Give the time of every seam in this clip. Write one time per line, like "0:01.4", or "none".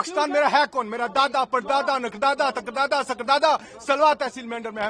none